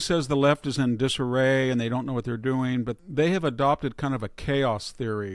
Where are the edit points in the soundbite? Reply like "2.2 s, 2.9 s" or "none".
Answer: 2.9 s